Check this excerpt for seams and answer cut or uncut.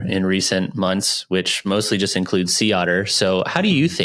uncut